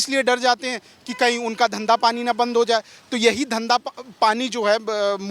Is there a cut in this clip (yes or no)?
no